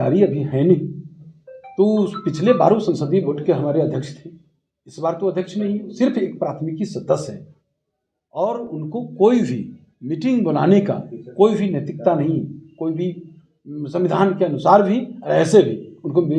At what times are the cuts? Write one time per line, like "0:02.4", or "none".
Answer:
none